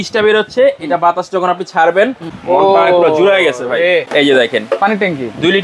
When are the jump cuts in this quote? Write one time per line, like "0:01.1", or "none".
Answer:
0:02.3
0:04.1